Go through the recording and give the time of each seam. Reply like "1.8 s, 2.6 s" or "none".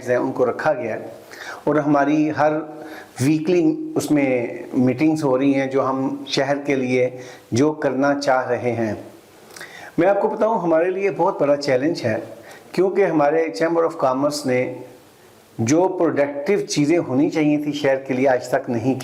none